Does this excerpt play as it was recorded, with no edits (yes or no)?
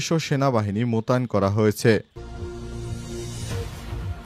no